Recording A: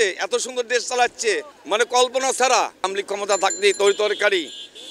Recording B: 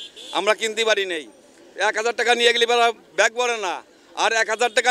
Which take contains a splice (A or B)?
A